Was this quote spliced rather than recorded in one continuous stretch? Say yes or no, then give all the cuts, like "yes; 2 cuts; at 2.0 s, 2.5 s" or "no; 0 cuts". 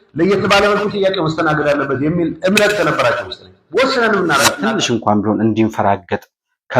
yes; 1 cut; at 4.6 s